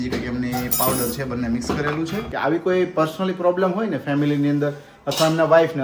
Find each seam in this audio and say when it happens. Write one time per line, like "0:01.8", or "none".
0:02.3